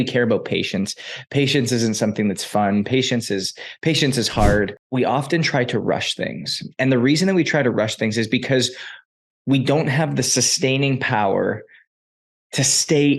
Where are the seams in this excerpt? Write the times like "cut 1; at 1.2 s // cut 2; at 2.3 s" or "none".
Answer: cut 1; at 4.8 s